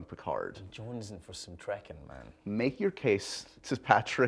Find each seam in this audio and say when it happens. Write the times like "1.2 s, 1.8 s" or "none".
none